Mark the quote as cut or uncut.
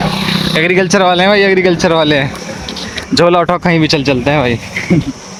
uncut